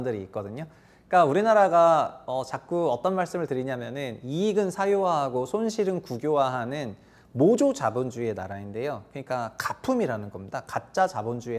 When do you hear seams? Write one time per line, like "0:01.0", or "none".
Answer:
none